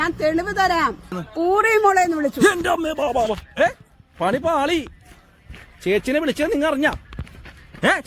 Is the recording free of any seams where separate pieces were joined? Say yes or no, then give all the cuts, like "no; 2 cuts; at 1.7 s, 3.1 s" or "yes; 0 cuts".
no; 1 cut; at 1.1 s